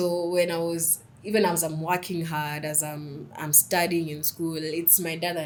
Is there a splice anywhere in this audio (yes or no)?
no